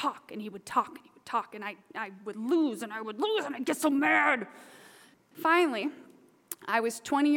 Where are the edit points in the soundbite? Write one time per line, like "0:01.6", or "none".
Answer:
0:05.1